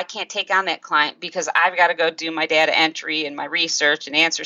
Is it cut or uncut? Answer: uncut